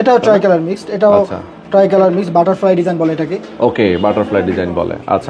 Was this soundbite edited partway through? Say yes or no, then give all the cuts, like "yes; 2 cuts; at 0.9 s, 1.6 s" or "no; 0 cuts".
no; 0 cuts